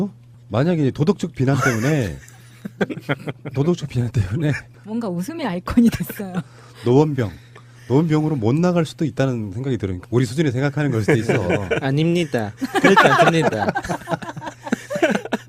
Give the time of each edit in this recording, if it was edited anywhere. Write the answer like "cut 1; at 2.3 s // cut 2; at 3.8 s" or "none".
none